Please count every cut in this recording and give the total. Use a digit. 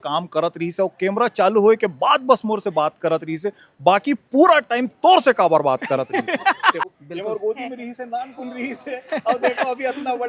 1